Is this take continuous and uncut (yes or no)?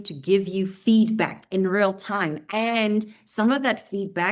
yes